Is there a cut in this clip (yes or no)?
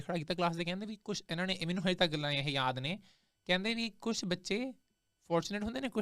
no